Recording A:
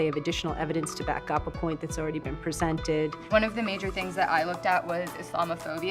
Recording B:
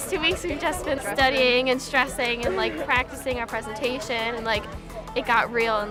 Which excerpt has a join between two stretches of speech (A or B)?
A